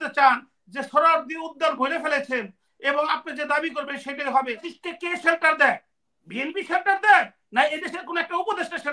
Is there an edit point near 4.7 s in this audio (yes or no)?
yes